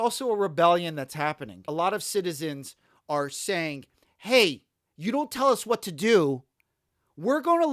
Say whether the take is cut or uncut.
cut